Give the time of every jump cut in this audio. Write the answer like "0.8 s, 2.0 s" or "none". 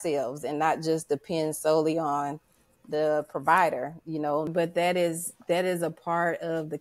4.5 s

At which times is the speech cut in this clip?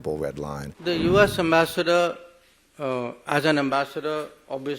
0.9 s

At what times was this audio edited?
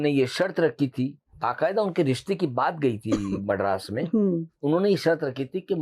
1.2 s, 4.5 s

